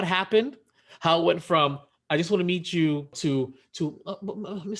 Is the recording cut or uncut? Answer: cut